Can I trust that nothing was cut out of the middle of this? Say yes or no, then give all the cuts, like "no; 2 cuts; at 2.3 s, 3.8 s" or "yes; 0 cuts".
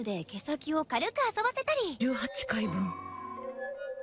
yes; 0 cuts